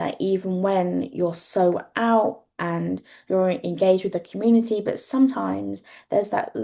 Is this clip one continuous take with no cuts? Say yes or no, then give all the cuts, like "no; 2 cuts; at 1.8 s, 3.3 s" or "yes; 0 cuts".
yes; 0 cuts